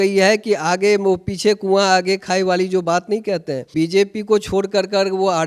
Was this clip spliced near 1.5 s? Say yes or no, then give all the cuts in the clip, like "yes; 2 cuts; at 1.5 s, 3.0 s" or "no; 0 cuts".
no; 1 cut; at 3.7 s